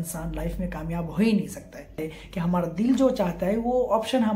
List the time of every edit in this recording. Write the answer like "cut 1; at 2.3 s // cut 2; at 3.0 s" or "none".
cut 1; at 2.1 s